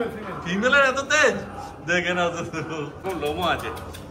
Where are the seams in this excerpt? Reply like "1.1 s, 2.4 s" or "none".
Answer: 3.0 s